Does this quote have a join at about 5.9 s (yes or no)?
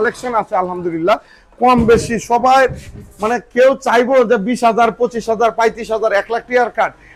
no